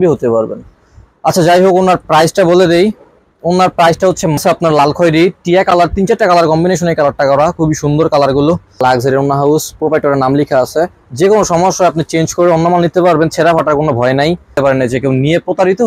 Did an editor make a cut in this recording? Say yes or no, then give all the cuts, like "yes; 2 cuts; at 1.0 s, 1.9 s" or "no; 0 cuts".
yes; 3 cuts; at 4.4 s, 8.8 s, 14.6 s